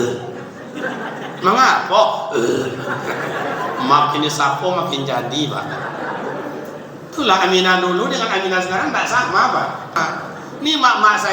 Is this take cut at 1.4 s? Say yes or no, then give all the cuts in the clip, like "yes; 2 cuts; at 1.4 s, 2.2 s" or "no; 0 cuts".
no; 1 cut; at 10.0 s